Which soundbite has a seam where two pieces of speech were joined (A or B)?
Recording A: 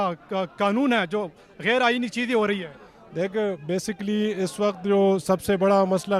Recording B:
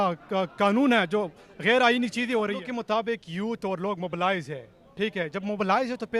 B